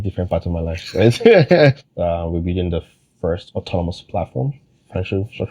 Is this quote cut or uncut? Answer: cut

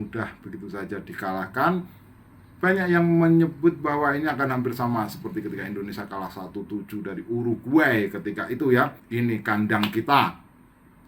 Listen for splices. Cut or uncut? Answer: cut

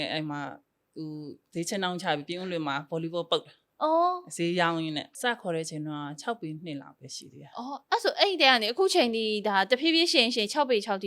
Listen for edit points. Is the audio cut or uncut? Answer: cut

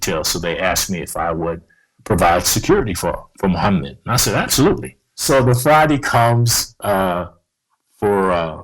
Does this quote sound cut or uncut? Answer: cut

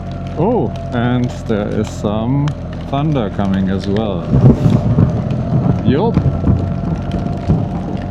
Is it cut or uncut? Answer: uncut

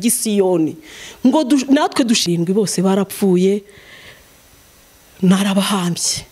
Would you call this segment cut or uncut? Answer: cut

